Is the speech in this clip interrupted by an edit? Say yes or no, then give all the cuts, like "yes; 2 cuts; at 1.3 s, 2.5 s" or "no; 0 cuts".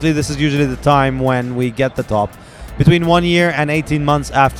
no; 0 cuts